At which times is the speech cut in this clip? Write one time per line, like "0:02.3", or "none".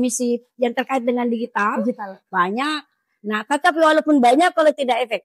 none